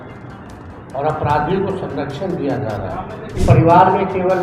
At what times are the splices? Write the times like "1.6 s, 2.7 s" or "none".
3.4 s